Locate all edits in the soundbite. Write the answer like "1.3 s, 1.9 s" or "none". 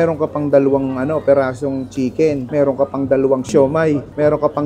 2.5 s, 3.5 s